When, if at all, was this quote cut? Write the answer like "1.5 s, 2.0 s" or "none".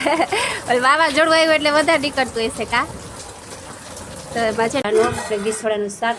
4.8 s